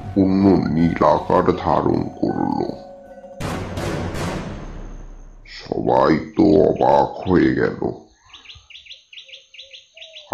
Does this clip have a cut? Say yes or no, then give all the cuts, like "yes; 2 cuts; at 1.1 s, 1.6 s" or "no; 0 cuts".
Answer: no; 0 cuts